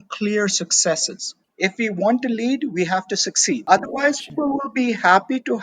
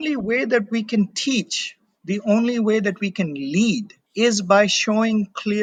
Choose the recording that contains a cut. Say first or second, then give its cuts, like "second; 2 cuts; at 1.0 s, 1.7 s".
first; 3 cuts; at 1.4 s, 3.6 s, 4.3 s